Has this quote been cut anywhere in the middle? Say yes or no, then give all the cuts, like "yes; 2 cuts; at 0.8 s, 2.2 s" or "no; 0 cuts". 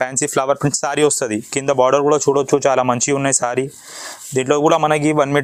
no; 0 cuts